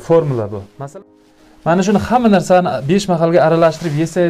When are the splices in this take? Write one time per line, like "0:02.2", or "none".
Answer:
0:00.9